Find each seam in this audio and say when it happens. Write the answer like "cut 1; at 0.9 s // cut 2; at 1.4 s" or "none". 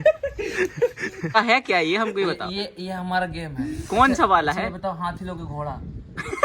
cut 1; at 1.3 s